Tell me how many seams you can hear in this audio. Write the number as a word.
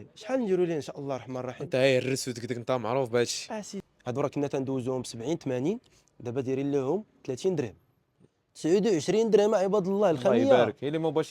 one